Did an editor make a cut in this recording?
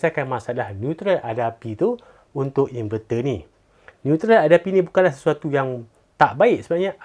no; 0 cuts

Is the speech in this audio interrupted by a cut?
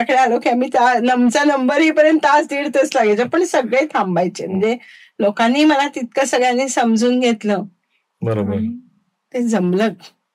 no; 0 cuts

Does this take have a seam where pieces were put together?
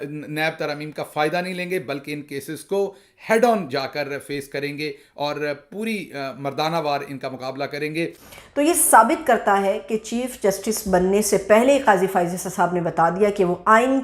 yes; 1 cut; at 8.2 s

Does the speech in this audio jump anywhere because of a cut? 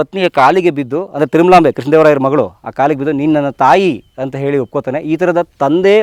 no; 0 cuts

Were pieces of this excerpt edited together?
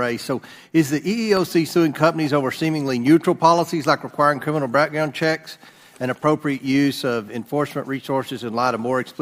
no; 0 cuts

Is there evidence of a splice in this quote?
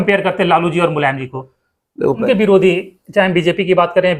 yes; 1 cut; at 2.2 s

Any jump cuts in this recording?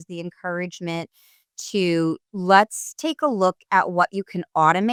no; 0 cuts

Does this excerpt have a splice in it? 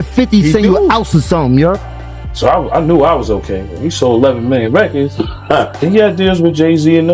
yes; 2 cuts; at 1.8 s, 5.8 s

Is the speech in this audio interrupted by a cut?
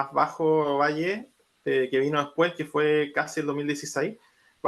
no; 0 cuts

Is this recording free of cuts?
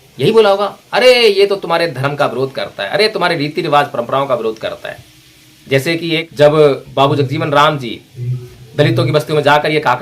no; 1 cut; at 6.3 s

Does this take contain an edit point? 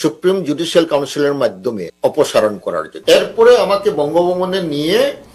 yes; 2 cuts; at 1.9 s, 2.9 s

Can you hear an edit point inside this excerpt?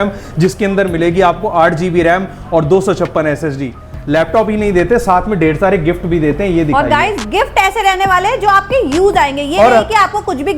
yes; 1 cut; at 3.9 s

